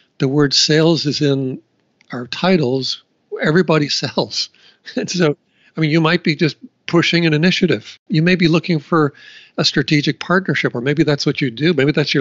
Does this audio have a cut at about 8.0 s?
yes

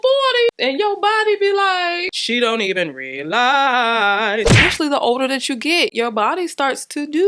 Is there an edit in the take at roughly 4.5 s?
yes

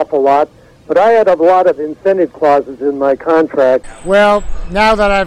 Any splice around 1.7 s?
no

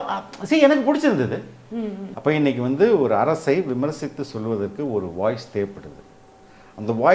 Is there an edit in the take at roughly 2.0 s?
yes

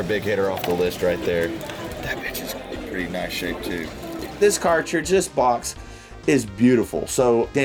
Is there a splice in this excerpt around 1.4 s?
no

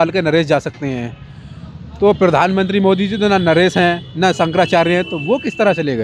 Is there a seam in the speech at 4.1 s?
no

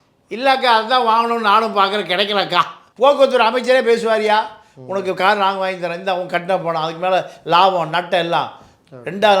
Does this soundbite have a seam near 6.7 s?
no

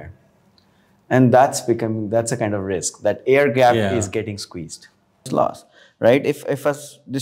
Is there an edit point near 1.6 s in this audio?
no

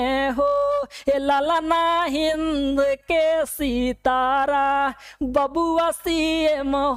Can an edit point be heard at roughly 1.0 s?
no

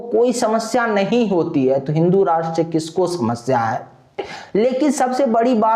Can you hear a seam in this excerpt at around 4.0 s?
no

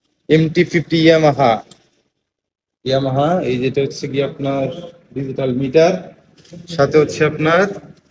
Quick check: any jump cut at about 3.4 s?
no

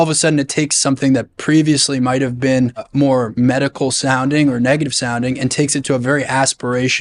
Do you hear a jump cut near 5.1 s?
no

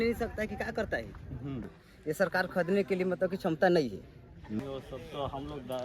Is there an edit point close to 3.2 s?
no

